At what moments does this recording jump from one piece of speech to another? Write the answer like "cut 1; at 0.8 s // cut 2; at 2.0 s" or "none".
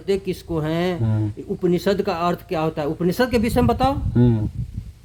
none